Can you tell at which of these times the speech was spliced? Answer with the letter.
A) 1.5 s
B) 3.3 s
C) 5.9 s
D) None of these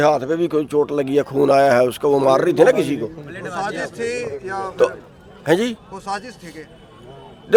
D